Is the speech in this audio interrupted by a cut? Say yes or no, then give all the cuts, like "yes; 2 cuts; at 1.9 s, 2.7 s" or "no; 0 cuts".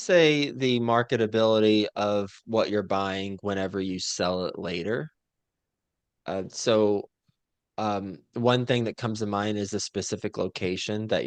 no; 0 cuts